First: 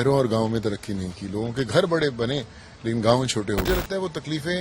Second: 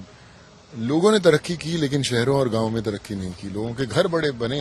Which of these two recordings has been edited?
first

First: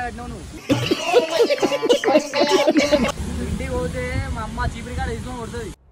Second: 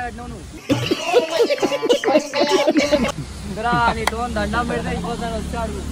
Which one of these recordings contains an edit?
first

